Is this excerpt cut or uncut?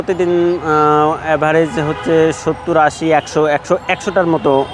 uncut